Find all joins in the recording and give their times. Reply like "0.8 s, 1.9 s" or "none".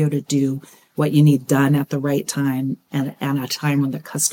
2.9 s

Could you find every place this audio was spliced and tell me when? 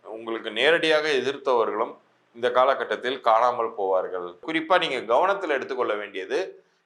4.4 s

